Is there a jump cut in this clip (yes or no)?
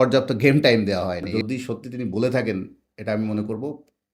yes